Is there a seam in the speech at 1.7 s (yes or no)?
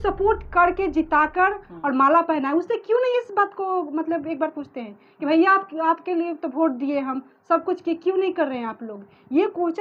no